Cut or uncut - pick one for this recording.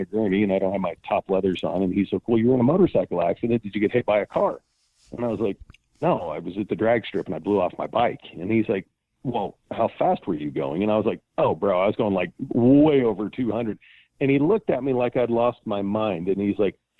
uncut